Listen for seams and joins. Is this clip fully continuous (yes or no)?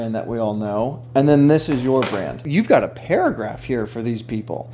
no